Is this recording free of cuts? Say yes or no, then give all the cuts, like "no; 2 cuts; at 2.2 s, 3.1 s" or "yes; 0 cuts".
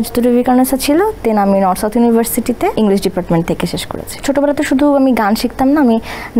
no; 2 cuts; at 2.7 s, 4.2 s